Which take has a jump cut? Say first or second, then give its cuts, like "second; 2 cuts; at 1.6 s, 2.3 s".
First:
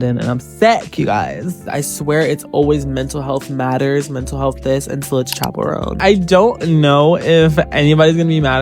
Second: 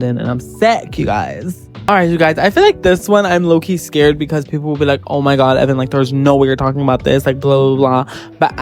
first; 2 cuts; at 1.7 s, 6.0 s